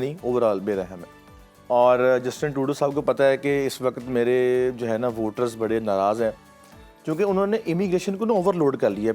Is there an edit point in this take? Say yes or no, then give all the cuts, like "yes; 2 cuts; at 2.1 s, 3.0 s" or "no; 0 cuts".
no; 0 cuts